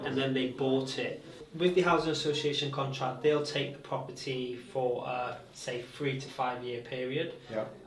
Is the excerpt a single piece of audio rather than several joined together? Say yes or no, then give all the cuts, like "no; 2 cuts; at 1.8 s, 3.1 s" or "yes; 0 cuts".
no; 1 cut; at 1.4 s